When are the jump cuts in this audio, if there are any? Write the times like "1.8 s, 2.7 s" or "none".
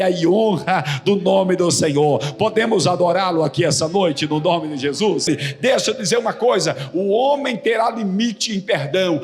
5.3 s